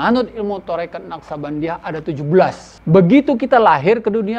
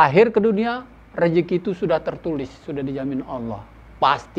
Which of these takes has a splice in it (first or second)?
first